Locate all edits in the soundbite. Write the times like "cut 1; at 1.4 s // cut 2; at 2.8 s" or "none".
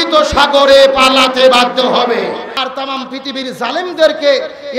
cut 1; at 2.6 s